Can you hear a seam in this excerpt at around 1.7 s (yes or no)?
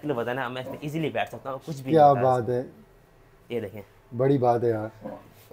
no